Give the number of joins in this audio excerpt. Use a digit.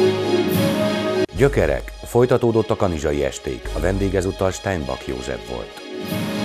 1